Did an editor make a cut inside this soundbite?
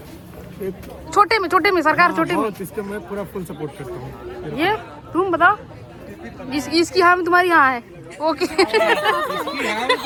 no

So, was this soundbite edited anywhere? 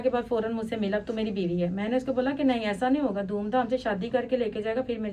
no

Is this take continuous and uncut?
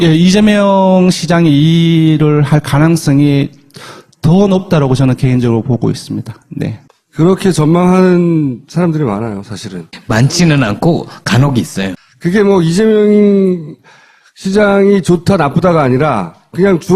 no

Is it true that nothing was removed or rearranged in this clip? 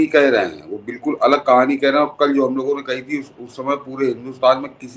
yes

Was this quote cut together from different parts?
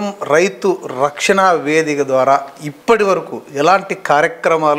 no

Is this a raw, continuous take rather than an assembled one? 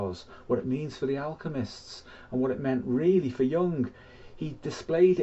yes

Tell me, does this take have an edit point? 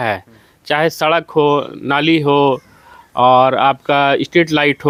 no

